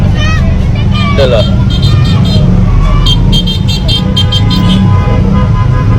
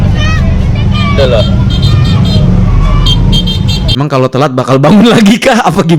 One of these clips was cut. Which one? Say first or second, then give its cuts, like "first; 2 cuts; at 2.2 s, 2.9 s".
second; 1 cut; at 3.9 s